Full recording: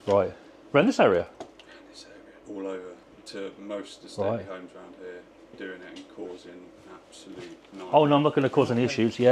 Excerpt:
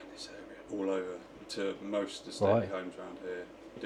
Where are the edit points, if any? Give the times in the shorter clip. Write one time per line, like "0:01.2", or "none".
none